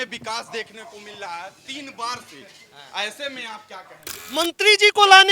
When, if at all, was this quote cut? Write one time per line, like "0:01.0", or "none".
0:04.4